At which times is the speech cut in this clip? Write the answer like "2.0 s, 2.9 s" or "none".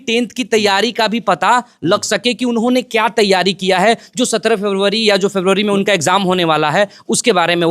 none

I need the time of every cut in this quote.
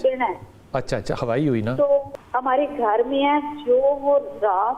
2.1 s

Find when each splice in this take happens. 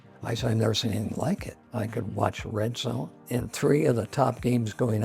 1.6 s, 3.2 s

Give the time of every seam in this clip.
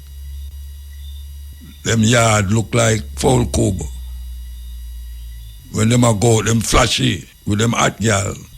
1.6 s, 5.6 s, 7.3 s

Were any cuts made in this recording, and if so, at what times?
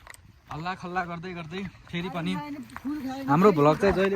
none

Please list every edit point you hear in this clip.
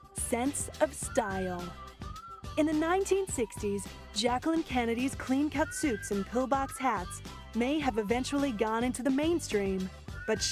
3.5 s

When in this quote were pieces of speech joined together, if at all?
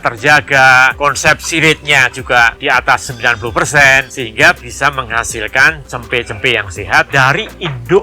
0.9 s, 4.1 s, 7.1 s

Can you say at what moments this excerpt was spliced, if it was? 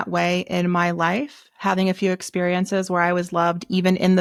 none

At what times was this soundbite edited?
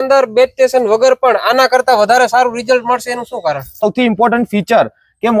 3.8 s

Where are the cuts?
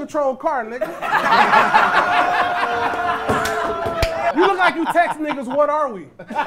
4.3 s

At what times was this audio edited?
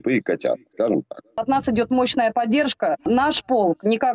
1.4 s, 3.1 s

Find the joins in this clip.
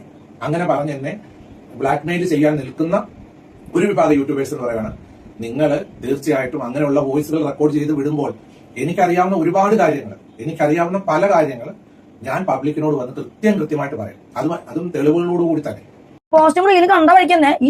16.3 s

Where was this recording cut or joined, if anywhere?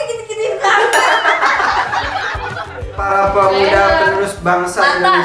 3.0 s

